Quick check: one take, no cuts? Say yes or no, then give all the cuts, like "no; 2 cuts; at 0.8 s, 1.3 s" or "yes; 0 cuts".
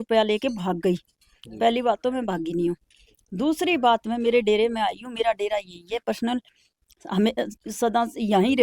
yes; 0 cuts